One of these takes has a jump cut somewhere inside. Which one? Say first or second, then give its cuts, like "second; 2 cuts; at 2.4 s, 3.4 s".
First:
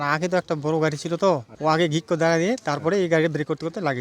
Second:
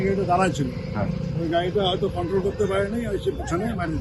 first; 1 cut; at 1.5 s